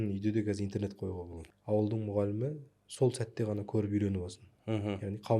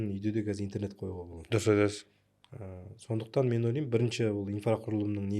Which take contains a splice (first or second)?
first